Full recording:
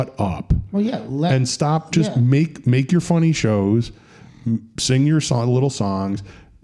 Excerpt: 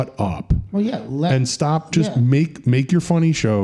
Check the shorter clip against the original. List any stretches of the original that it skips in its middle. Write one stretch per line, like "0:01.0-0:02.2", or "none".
none